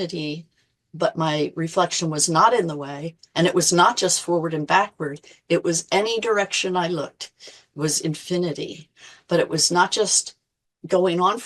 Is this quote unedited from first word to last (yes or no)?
yes